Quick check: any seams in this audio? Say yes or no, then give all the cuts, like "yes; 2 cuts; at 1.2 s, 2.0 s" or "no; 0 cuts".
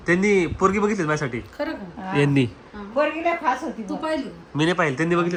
no; 0 cuts